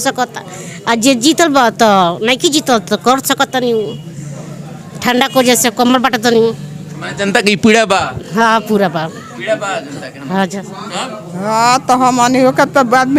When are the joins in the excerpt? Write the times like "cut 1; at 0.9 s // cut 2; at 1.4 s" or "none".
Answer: none